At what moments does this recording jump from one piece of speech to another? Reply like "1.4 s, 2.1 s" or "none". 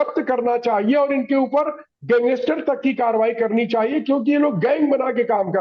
none